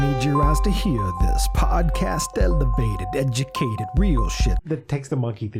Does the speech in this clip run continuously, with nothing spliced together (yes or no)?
no